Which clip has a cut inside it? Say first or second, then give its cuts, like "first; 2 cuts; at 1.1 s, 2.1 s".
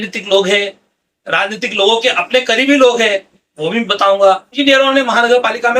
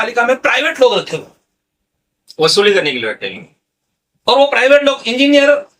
first; 1 cut; at 4.5 s